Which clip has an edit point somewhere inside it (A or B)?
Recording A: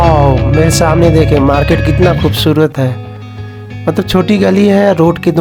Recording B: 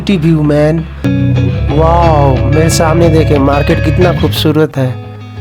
B